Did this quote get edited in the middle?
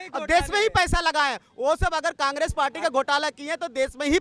no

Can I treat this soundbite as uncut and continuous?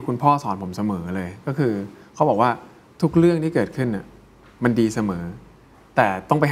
yes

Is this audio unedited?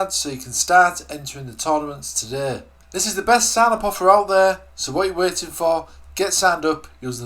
no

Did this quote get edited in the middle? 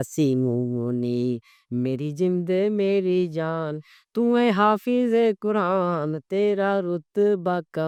no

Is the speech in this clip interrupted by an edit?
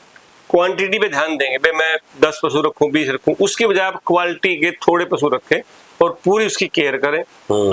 no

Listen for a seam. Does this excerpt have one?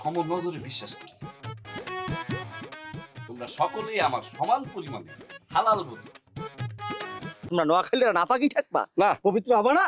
yes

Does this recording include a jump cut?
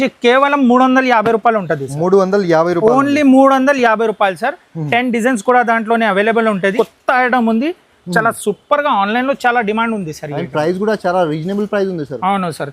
yes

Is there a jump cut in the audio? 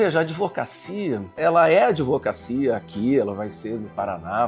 yes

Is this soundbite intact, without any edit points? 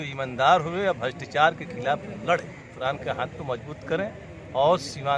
no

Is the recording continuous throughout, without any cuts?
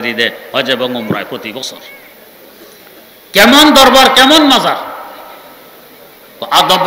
yes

